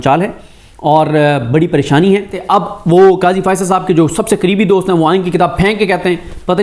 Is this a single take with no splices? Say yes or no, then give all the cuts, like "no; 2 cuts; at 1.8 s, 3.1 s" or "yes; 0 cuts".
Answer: no; 1 cut; at 2.4 s